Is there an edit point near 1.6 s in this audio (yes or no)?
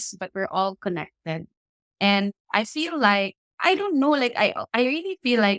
no